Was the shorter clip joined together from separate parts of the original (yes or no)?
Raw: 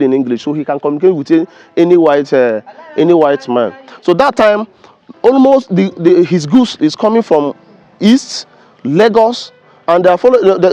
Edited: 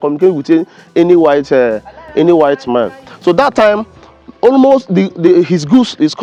no